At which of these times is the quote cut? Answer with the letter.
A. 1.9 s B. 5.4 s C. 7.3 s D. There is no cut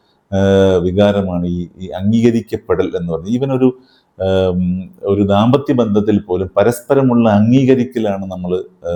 D